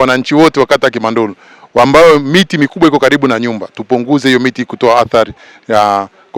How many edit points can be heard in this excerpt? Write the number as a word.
zero